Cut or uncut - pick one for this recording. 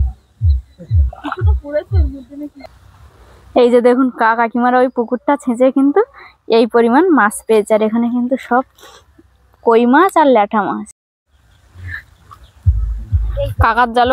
cut